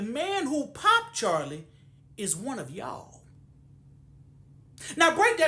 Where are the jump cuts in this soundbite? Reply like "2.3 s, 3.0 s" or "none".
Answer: none